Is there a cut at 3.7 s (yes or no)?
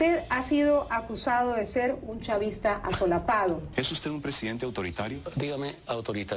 yes